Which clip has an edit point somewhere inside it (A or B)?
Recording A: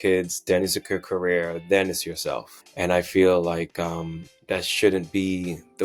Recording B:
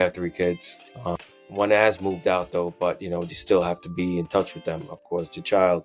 B